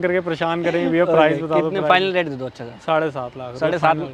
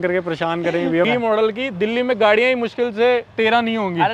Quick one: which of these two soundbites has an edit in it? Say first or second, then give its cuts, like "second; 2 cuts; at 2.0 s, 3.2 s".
second; 1 cut; at 1.1 s